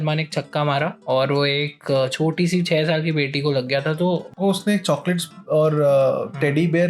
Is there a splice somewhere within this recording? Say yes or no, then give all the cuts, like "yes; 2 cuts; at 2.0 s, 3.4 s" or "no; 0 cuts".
yes; 2 cuts; at 1.0 s, 4.3 s